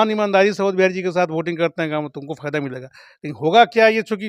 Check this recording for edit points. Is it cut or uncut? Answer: uncut